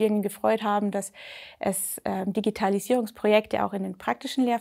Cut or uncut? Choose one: uncut